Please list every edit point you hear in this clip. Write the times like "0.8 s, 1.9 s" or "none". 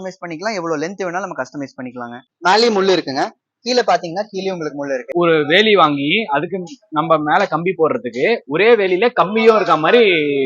2.2 s, 5.1 s